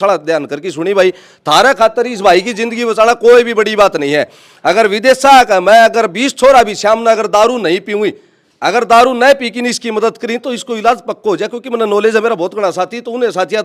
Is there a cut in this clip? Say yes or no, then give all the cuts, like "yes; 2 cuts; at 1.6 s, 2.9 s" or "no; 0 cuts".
no; 0 cuts